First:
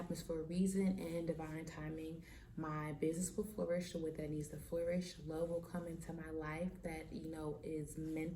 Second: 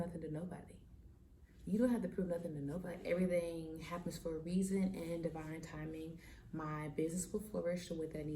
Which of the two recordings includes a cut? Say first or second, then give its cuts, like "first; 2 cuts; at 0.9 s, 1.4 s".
second; 1 cut; at 2.9 s